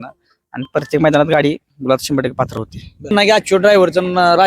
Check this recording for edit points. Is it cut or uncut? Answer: cut